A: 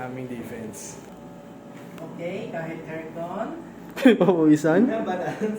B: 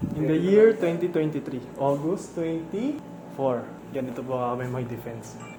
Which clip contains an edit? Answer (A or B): A